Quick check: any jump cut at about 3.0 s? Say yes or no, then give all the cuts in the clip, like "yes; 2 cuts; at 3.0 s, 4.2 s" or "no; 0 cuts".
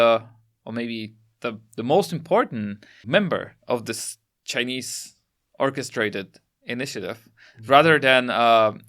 yes; 1 cut; at 3.0 s